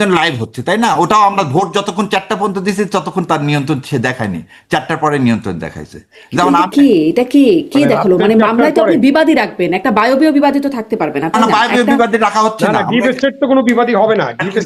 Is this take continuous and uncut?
yes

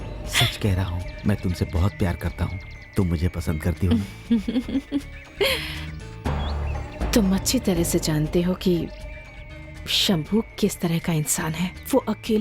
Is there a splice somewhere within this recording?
no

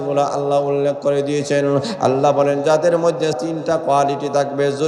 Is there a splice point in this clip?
yes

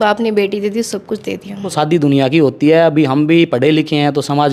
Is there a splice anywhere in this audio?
yes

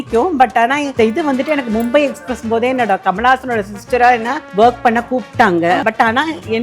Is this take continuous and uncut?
no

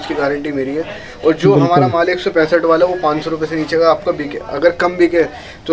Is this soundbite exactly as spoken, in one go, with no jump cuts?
yes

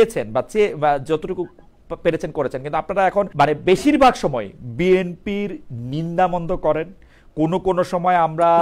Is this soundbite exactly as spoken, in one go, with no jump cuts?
yes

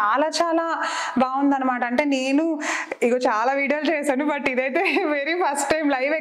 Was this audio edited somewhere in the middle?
no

